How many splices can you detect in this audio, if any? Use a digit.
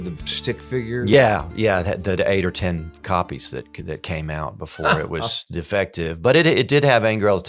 2